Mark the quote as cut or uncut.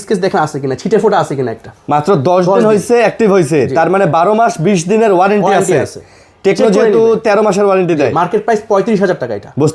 uncut